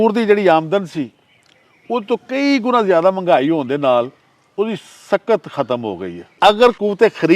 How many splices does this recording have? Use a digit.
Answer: 1